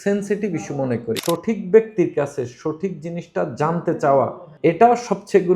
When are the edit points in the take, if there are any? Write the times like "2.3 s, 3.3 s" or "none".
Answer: 1.2 s, 4.4 s

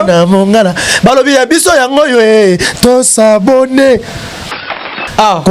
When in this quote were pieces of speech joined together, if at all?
4.5 s

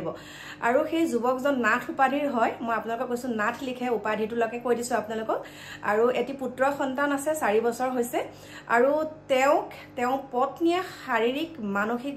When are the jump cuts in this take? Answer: none

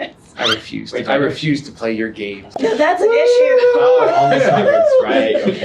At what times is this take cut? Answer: 2.4 s

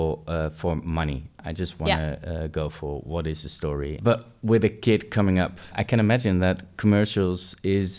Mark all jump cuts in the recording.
4.0 s, 5.8 s

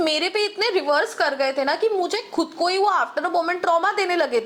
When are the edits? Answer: none

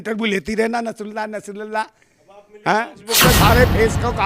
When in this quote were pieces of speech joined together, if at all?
3.2 s

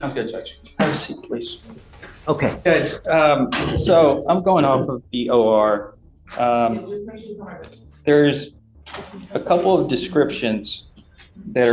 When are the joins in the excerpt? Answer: 10.1 s

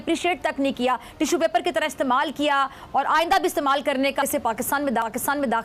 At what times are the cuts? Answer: 4.3 s

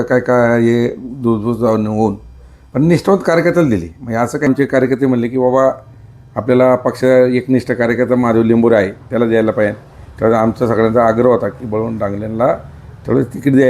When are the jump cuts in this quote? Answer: 4.5 s

